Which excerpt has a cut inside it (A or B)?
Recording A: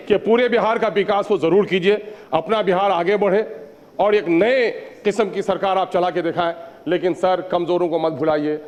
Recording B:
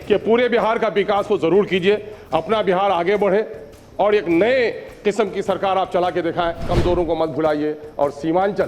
B